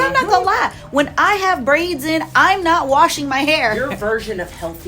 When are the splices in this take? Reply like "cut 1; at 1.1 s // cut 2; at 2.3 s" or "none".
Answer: cut 1; at 3.8 s